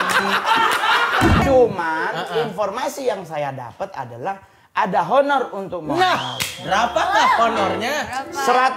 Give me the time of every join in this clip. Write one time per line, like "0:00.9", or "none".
0:01.4